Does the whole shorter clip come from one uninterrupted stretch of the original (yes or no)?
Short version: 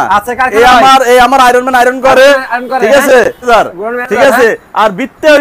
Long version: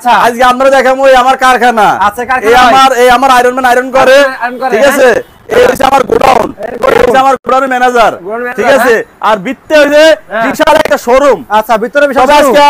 no